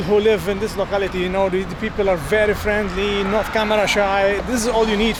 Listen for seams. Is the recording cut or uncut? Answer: uncut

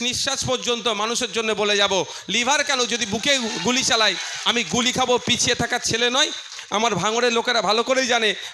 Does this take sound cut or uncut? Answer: uncut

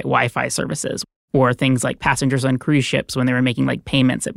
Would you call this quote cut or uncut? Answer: cut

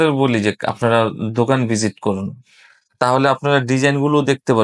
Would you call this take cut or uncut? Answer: uncut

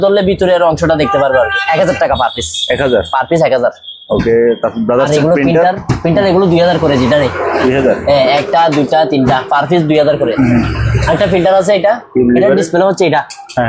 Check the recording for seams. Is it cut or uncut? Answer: uncut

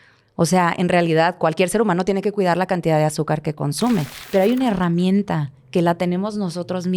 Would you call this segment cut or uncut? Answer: cut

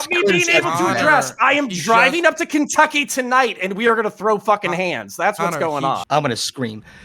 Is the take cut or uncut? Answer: cut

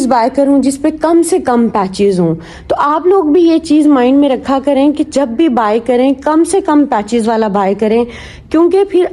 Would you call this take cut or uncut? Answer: uncut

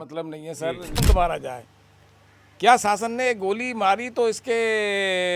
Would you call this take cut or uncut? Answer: cut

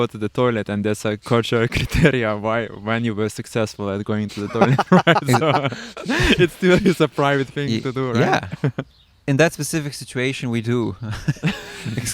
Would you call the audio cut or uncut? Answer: cut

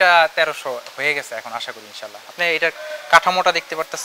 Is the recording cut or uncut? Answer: uncut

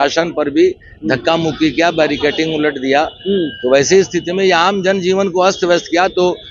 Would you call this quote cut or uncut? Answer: uncut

